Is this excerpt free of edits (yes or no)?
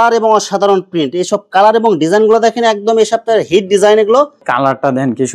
no